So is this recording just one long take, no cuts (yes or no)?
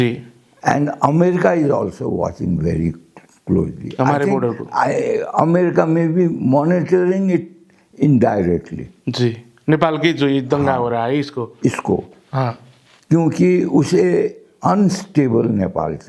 yes